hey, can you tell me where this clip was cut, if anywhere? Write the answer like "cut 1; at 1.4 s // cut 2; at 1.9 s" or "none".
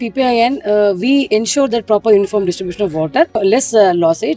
cut 1; at 3.4 s